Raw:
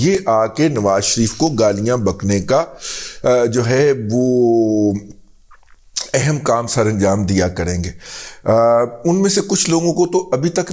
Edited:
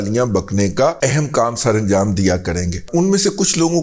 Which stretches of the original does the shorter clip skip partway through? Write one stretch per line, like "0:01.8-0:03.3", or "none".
0:02.7-0:06.1
0:07.9-0:08.9